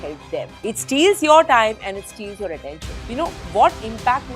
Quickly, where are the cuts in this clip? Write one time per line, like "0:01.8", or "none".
0:02.9